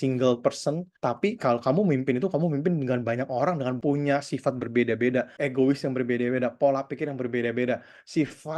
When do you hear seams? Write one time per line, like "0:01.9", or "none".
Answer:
0:00.9
0:03.8
0:05.3